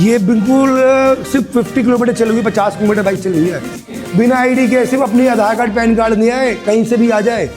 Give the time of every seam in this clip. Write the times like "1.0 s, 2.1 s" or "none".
4.0 s